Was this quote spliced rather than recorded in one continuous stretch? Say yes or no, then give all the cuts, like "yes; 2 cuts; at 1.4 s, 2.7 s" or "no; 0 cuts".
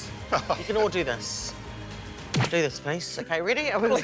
no; 0 cuts